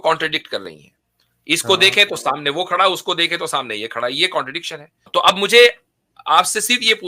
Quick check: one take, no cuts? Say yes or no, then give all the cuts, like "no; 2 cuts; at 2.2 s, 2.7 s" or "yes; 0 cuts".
no; 1 cut; at 5.0 s